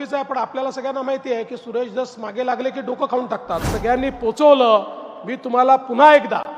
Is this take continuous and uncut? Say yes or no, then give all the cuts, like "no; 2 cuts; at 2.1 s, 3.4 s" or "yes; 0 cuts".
no; 1 cut; at 3.7 s